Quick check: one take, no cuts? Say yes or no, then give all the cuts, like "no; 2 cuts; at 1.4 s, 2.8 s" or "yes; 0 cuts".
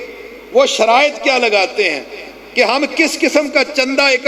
yes; 0 cuts